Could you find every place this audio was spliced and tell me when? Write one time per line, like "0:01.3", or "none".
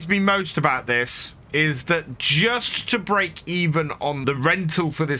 0:04.2